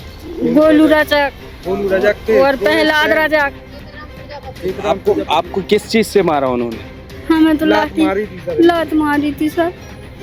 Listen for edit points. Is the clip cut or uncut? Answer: uncut